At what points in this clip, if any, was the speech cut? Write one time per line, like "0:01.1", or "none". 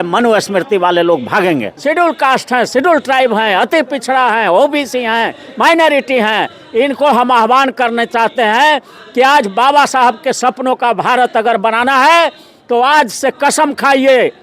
0:01.7